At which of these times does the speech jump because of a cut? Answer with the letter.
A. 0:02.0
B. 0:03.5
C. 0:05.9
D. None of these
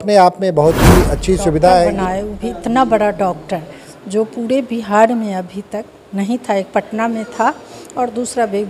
A